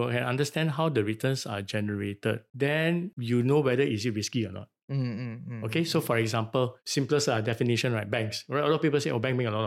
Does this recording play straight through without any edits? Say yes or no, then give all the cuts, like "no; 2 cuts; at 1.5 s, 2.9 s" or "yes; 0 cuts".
yes; 0 cuts